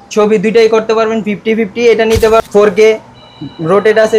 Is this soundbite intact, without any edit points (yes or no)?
no